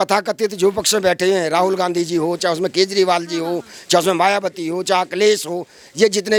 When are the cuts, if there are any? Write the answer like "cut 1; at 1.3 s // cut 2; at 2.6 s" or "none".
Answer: none